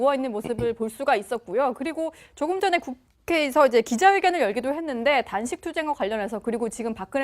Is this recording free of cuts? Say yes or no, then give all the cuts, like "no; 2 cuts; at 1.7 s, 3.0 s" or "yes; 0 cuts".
no; 1 cut; at 1.5 s